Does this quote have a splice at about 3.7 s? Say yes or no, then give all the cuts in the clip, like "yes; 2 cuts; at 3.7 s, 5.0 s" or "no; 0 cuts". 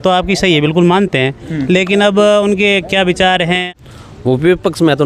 yes; 1 cut; at 3.7 s